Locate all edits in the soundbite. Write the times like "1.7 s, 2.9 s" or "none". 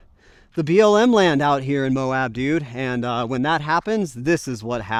none